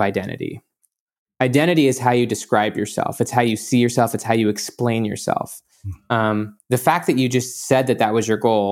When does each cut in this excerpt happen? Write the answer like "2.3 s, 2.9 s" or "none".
1.0 s